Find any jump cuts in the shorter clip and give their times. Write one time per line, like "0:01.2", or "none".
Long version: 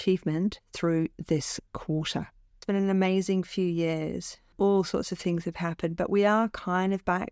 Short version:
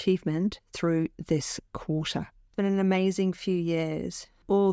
0:02.4